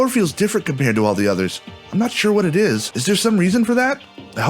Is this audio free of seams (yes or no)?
no